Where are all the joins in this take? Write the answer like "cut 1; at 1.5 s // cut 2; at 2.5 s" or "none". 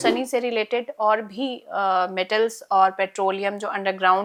none